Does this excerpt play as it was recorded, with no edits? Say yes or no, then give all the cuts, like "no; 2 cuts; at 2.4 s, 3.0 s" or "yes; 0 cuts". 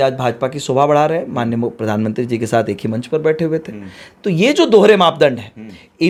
yes; 0 cuts